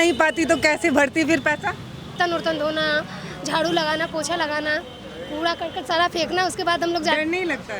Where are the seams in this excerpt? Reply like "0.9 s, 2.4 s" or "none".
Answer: 2.1 s